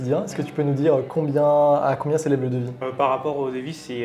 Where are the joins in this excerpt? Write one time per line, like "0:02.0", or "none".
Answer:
0:02.8